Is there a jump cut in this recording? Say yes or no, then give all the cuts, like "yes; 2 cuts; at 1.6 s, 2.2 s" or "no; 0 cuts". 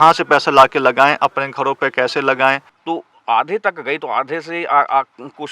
yes; 1 cut; at 2.7 s